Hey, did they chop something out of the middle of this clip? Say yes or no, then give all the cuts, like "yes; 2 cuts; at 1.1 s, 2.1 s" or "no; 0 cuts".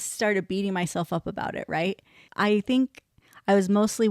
yes; 1 cut; at 2.2 s